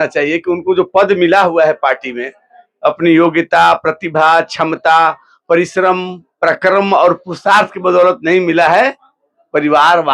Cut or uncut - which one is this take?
uncut